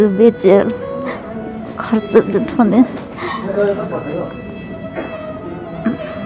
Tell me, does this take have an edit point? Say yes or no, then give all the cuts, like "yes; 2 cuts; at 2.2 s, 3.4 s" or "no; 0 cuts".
no; 0 cuts